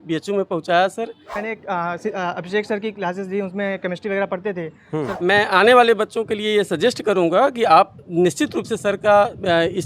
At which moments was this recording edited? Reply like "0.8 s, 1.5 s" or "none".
1.3 s, 4.9 s